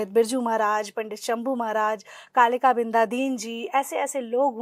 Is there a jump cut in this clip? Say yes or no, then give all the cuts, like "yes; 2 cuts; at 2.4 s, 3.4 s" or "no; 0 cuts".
no; 0 cuts